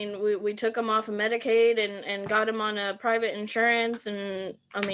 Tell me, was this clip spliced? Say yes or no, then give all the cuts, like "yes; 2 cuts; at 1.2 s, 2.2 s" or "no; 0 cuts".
no; 0 cuts